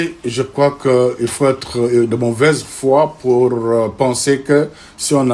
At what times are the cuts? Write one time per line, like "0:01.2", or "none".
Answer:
none

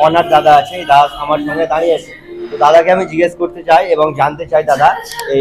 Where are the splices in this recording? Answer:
none

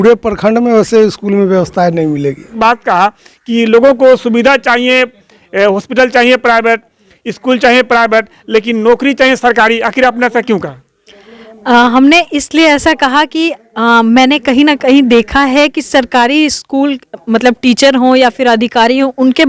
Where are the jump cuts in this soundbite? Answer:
0:02.5

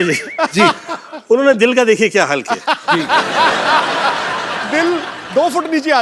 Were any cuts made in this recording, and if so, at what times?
none

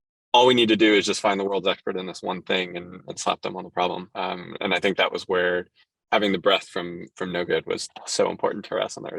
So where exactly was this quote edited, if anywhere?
0:04.1

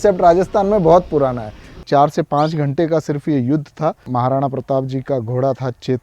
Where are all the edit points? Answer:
0:01.8
0:04.0

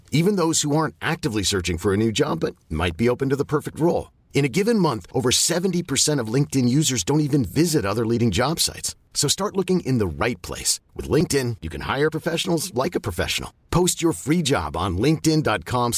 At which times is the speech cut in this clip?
none

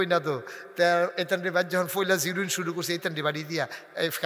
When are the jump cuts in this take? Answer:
none

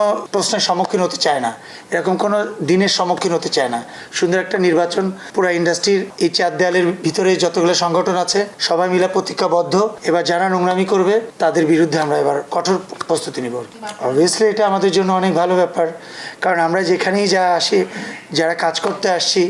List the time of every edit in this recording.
none

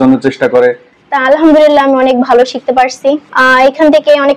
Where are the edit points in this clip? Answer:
0:00.9
0:03.3

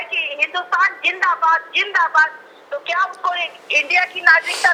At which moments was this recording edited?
none

